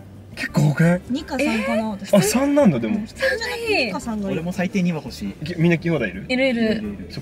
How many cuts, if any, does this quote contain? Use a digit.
0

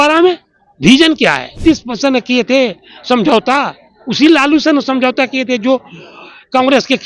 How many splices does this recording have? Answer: 1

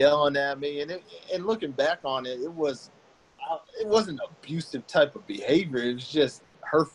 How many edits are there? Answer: 1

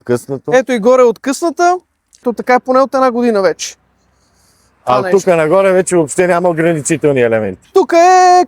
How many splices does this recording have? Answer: 2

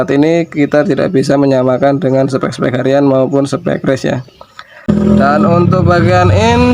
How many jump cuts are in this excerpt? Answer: 1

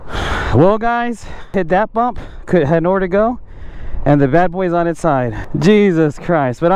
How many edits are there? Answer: 2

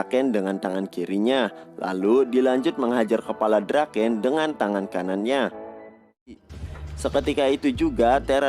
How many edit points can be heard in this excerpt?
1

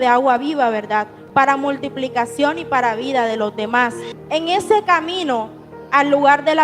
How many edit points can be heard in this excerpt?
1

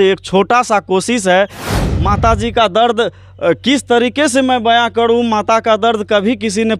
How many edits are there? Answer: 1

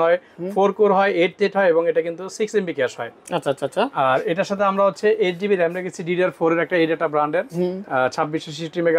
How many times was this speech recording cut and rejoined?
0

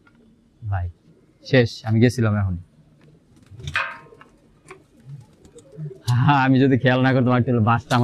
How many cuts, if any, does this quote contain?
0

